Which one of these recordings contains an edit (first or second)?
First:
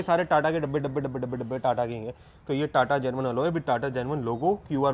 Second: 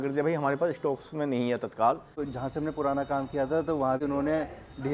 second